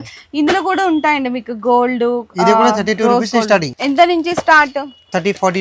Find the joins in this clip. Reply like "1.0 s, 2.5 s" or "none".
3.7 s